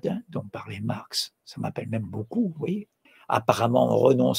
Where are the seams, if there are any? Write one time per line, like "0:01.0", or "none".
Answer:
0:02.9